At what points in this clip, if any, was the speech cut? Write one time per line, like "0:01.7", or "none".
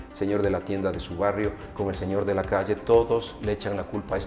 none